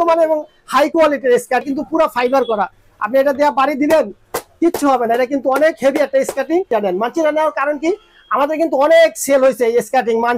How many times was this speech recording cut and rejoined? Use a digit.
2